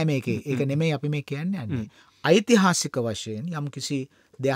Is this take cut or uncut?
uncut